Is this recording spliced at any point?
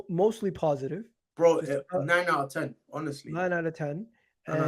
no; 0 cuts

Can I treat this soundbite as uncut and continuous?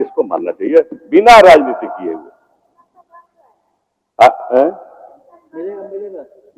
yes; 0 cuts

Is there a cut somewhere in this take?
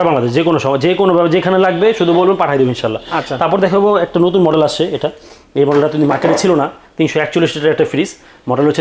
no; 0 cuts

